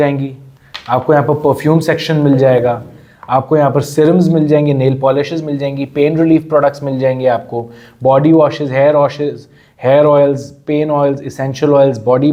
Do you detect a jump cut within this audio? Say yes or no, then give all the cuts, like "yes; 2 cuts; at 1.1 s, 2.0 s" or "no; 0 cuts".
no; 0 cuts